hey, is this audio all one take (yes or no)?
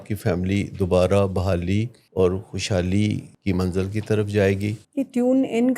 no